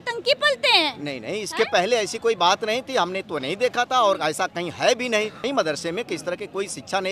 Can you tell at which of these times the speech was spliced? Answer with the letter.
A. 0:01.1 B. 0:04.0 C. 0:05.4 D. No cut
C